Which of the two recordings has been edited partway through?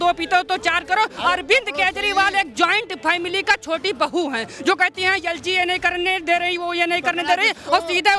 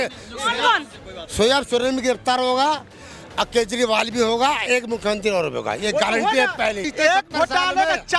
second; 1 cut; at 6.9 s

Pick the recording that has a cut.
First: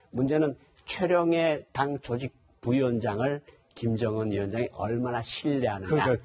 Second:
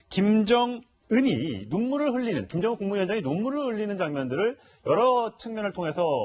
first; 1 cut; at 1.0 s

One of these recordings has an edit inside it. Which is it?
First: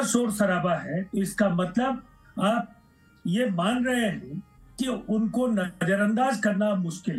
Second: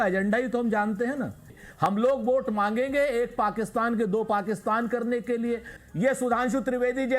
second; 2 cuts; at 1.9 s, 5.8 s

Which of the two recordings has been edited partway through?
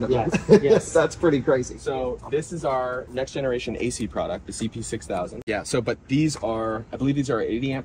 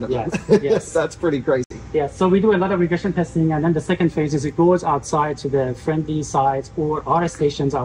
first; 2 cuts; at 1.8 s, 5.4 s

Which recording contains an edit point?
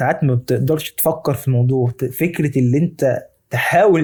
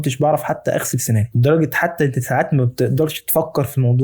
second; 1 cut; at 1.3 s

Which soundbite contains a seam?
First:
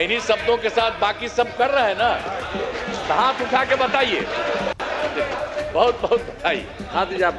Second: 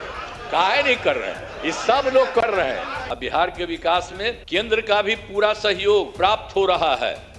second; 3 cuts; at 3.0 s, 4.4 s, 6.1 s

